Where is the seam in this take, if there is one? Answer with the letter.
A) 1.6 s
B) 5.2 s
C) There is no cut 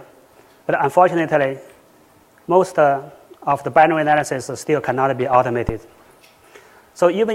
B